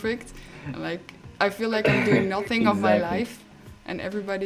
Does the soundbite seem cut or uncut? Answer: uncut